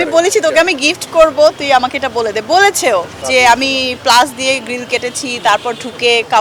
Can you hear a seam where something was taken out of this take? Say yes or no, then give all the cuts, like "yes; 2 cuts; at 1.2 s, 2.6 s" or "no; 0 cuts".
no; 0 cuts